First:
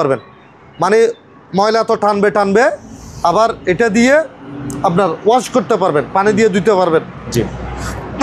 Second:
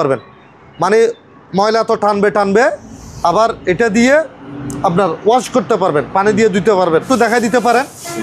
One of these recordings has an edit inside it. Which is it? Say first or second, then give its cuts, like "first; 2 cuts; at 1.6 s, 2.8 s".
second; 1 cut; at 7.1 s